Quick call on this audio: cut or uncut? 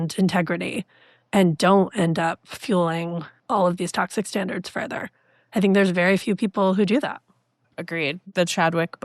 cut